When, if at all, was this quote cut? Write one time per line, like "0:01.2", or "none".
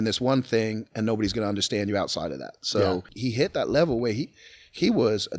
0:03.1